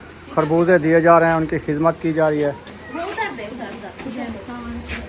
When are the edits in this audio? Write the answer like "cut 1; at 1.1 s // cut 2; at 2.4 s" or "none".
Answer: cut 1; at 2.7 s